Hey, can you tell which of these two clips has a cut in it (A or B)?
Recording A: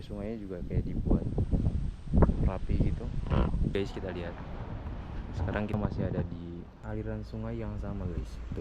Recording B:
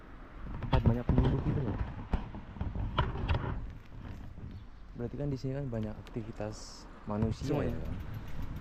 A